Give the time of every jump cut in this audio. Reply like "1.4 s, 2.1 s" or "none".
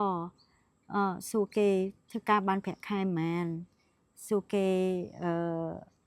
none